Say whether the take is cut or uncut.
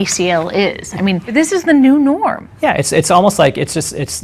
cut